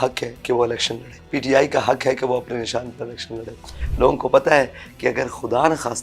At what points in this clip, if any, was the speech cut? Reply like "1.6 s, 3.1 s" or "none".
1.1 s, 3.8 s